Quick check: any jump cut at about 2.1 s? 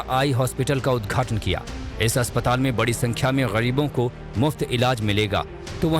yes; 1 cut; at 2.1 s

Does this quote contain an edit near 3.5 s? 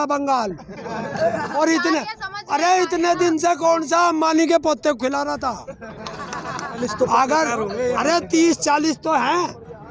no; 2 cuts; at 1.5 s, 6.8 s

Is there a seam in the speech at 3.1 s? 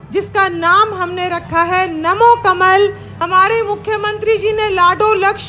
yes; 1 cut; at 3.1 s

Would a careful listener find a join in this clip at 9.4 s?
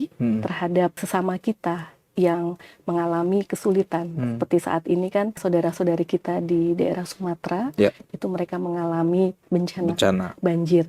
yes; 3 cuts; at 1.0 s, 5.4 s, 9.4 s

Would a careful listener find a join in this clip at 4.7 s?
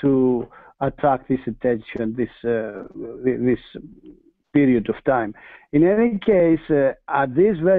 yes; 1 cut; at 4.7 s

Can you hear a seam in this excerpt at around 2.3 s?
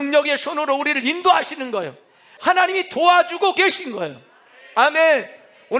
yes; 1 cut; at 2.3 s

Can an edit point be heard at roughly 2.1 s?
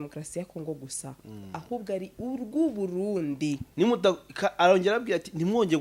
no; 1 cut; at 3.7 s

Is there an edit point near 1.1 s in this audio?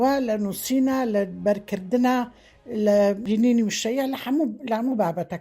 no; 1 cut; at 3.2 s

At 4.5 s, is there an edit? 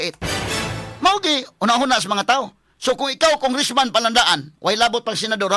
no; 0 cuts

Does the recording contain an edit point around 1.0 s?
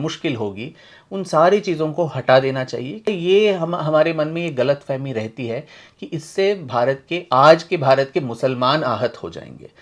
no; 1 cut; at 3.1 s

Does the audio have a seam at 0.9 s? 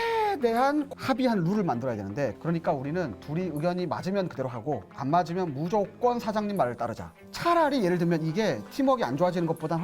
yes; 1 cut; at 0.9 s

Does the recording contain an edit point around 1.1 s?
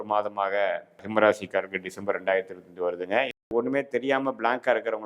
yes; 2 cuts; at 1.1 s, 3.4 s

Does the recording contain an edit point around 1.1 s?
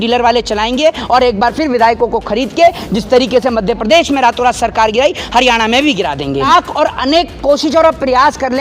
no; 1 cut; at 6.5 s

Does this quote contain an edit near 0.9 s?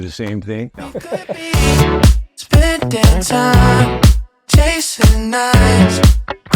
yes; 1 cut; at 0.9 s

